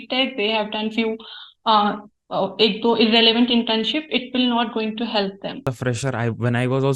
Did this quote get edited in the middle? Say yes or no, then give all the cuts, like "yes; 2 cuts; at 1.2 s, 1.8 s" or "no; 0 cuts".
yes; 1 cut; at 5.7 s